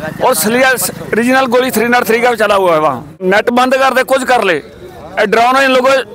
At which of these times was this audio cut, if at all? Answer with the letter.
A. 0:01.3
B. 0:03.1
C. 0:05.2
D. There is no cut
B